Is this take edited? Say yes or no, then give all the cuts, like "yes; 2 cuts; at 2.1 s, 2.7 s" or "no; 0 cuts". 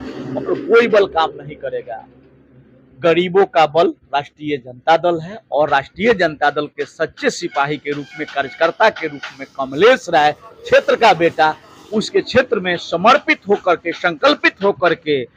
no; 0 cuts